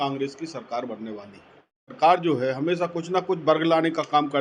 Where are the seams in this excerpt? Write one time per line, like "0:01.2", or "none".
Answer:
0:01.9